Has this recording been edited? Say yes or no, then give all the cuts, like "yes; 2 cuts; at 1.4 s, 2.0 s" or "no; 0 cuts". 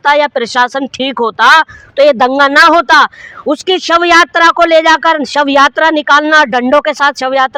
no; 0 cuts